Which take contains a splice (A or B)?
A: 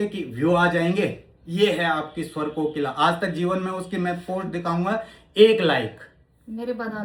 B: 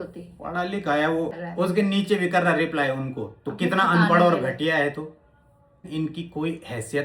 B